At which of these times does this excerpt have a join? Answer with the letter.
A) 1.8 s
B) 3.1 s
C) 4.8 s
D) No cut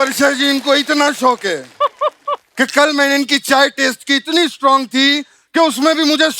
D